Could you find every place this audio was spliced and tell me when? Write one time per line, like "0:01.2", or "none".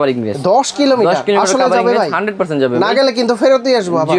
none

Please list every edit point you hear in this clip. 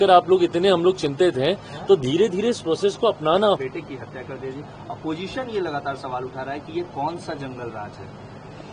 0:03.6

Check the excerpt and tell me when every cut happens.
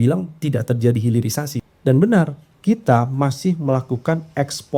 0:01.5
0:02.4

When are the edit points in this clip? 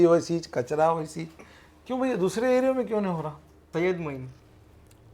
0:03.5

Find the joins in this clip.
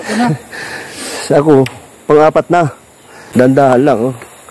0:03.3

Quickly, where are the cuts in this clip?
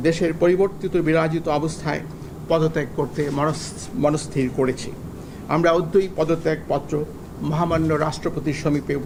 none

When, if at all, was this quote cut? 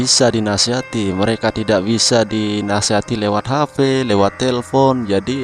none

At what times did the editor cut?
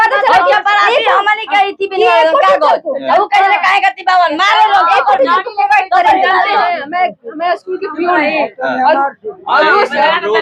none

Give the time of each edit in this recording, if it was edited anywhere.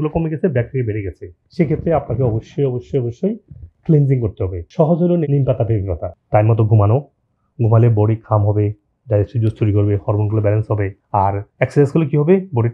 0:06.1

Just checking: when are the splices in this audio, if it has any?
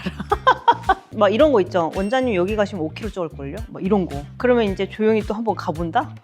0:01.1

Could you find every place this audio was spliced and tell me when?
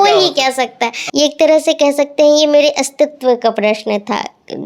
0:01.0

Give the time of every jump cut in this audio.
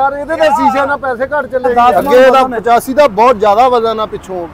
0:01.7

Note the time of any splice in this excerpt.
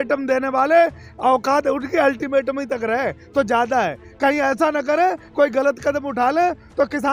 none

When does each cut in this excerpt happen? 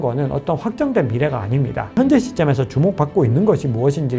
0:01.9

